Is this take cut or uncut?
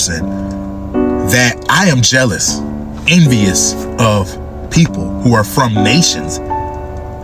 uncut